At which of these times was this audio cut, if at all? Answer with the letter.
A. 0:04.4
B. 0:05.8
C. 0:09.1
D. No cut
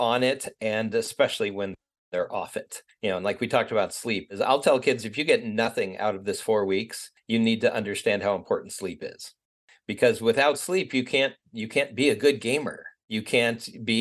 A